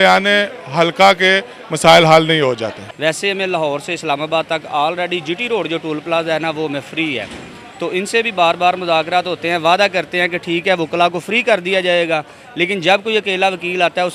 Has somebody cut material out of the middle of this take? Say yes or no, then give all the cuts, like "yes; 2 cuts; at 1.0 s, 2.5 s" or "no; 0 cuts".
no; 0 cuts